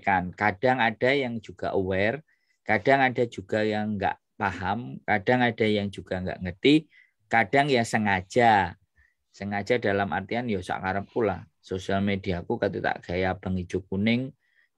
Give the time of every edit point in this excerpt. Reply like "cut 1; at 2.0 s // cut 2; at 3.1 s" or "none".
none